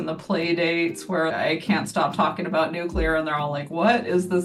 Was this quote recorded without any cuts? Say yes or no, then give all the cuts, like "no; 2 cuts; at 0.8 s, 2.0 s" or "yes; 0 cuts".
yes; 0 cuts